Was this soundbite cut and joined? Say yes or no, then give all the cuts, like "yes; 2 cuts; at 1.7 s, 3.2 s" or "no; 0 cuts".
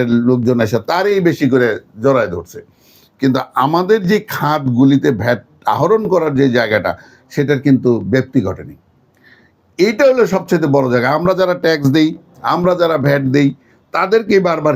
no; 0 cuts